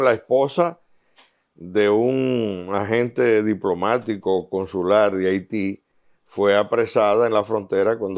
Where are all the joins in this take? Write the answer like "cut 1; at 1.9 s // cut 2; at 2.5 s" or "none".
none